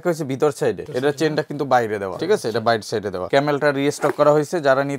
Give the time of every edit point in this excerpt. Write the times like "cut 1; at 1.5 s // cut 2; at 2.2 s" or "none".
cut 1; at 0.9 s // cut 2; at 2.1 s // cut 3; at 3.2 s

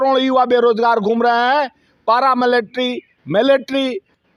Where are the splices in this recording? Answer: none

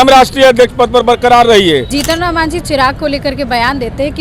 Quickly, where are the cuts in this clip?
cut 1; at 1.9 s

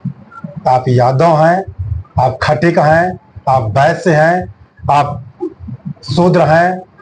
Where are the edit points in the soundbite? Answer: none

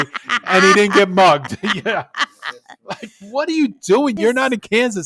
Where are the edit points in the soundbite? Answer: cut 1; at 4.2 s

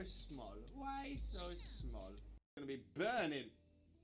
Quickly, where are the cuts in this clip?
cut 1; at 2.5 s

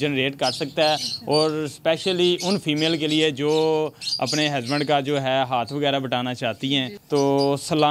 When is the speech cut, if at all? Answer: cut 1; at 7.0 s

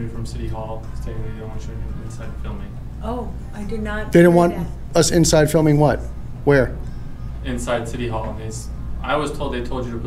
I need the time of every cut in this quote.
none

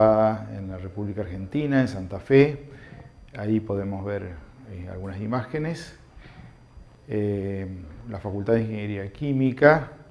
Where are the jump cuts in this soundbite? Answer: none

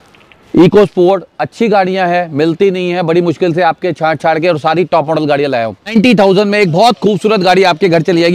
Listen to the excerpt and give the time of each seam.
cut 1; at 5.9 s

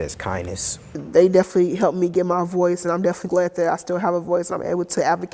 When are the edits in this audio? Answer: cut 1; at 1.0 s

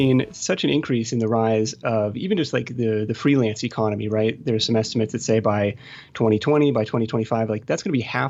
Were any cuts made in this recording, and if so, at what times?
none

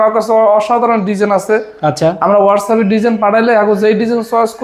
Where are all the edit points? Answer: none

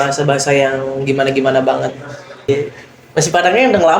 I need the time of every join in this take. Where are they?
cut 1; at 2.5 s

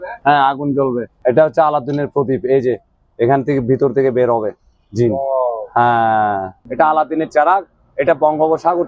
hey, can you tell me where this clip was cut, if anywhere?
cut 1; at 1.2 s // cut 2; at 6.5 s

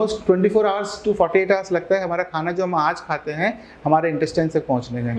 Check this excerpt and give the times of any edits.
none

